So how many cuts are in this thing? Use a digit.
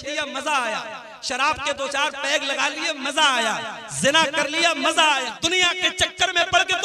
1